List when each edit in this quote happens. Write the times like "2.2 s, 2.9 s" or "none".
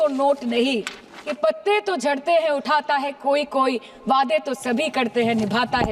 1.4 s